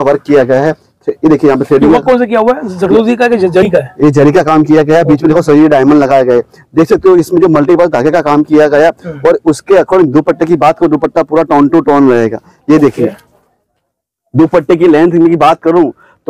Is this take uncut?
yes; 0 cuts

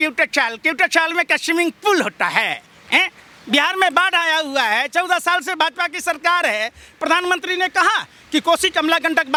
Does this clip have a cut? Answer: no; 0 cuts

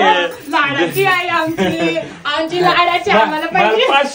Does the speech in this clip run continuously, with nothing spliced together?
yes; 0 cuts

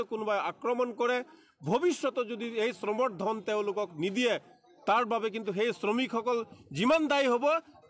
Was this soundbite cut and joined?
no; 0 cuts

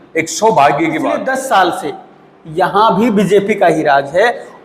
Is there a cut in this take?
yes; 1 cut; at 1.2 s

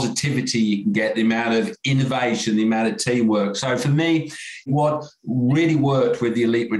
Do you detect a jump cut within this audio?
yes; 1 cut; at 4.7 s

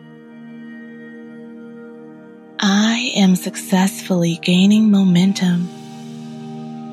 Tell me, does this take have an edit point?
no; 0 cuts

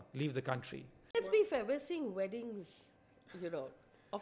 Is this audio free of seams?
no; 1 cut; at 1.2 s

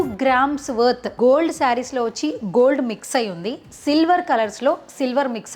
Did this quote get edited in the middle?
yes; 1 cut; at 1.1 s

